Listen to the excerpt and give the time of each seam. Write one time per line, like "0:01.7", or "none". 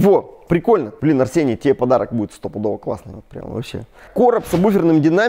0:00.9
0:04.0